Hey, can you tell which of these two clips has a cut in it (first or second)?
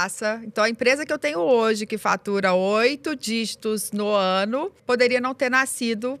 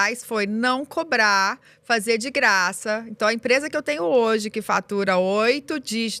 first